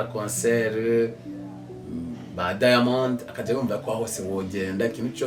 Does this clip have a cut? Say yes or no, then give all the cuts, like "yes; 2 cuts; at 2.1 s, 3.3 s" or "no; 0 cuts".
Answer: no; 0 cuts